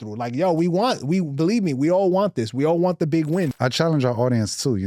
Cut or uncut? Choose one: cut